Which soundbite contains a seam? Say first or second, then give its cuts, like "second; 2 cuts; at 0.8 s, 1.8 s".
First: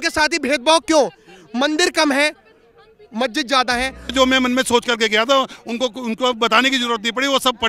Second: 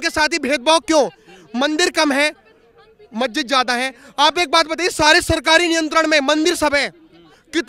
first; 1 cut; at 4.1 s